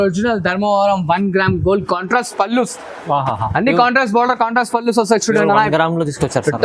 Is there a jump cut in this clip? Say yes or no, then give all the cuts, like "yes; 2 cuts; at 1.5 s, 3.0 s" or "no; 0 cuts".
no; 0 cuts